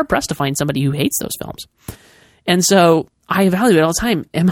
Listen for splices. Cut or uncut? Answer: uncut